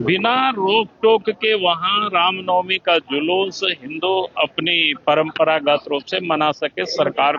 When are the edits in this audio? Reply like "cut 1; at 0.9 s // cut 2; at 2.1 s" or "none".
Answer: none